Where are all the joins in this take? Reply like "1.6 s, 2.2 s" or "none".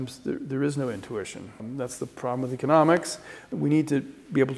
1.6 s, 3.5 s